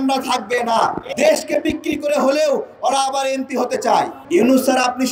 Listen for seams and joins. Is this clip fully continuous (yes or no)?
no